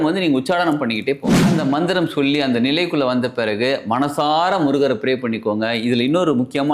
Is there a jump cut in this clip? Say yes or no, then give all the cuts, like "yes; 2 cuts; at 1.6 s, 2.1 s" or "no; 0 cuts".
yes; 1 cut; at 1.4 s